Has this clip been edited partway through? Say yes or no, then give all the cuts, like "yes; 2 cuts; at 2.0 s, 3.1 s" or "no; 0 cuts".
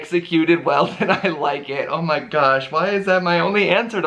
no; 0 cuts